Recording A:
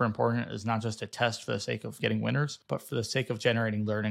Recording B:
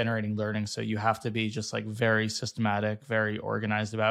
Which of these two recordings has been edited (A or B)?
A